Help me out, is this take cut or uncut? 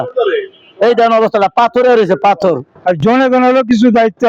cut